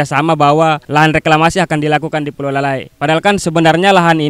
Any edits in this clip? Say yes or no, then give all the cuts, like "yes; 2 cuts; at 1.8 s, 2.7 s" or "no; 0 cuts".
no; 0 cuts